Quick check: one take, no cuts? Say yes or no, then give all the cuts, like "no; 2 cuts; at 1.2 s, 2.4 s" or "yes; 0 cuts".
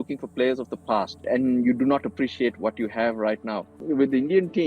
no; 2 cuts; at 1.2 s, 3.7 s